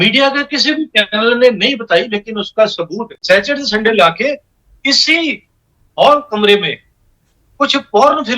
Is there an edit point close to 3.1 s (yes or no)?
yes